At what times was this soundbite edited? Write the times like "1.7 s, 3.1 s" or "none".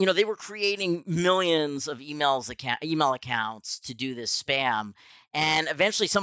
none